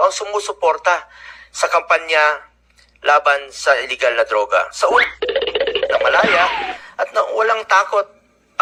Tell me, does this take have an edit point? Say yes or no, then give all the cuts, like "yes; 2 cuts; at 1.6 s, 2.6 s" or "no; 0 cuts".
no; 0 cuts